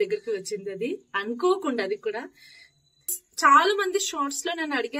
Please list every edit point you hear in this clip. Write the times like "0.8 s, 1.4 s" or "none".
3.2 s